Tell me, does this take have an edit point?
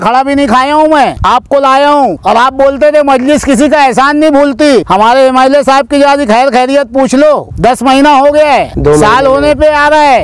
yes; 5 cuts; at 1.2 s, 2.2 s, 4.9 s, 7.5 s, 8.7 s

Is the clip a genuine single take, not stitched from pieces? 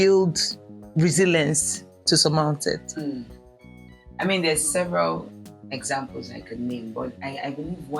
yes; 0 cuts

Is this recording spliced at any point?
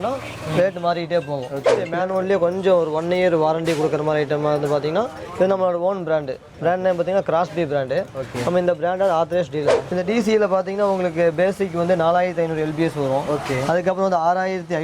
yes; 2 cuts; at 1.9 s, 9.9 s

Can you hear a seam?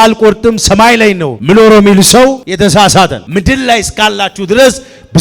yes; 3 cuts; at 1.3 s, 2.4 s, 3.2 s

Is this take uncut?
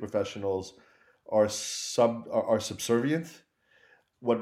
yes; 0 cuts

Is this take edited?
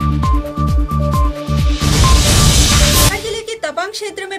yes; 1 cut; at 3.1 s

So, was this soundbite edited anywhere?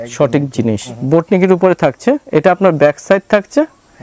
yes; 1 cut; at 0.9 s

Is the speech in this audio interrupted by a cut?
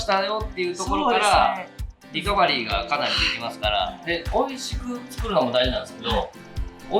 yes; 1 cut; at 4.0 s

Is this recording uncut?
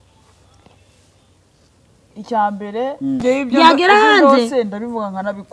no; 1 cut; at 3.2 s

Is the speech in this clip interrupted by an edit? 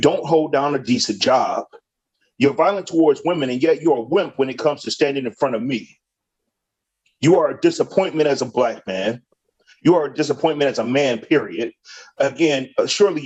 no; 0 cuts

